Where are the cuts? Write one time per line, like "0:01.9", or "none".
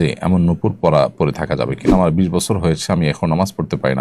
0:01.9